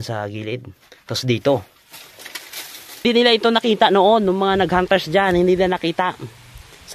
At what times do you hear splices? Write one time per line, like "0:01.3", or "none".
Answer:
0:03.0